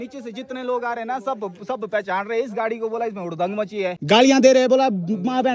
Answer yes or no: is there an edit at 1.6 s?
no